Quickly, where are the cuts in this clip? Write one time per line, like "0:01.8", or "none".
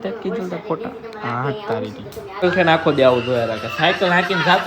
0:02.3